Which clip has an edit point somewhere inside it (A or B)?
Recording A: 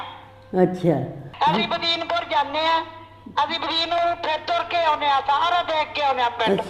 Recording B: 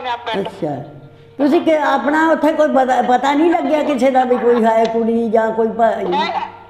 A